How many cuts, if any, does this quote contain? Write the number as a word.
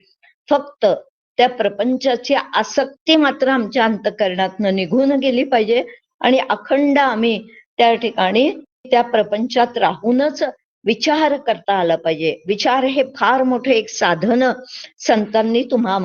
one